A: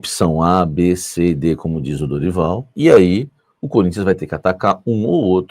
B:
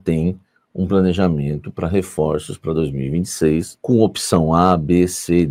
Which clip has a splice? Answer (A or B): A